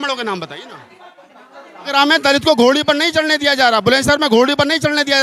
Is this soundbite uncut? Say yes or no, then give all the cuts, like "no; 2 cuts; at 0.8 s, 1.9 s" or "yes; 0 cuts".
no; 1 cut; at 1.9 s